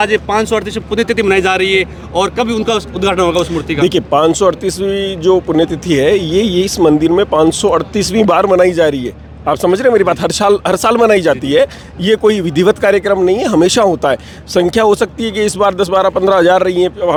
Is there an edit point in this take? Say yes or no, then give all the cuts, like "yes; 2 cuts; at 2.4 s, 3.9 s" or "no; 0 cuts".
no; 0 cuts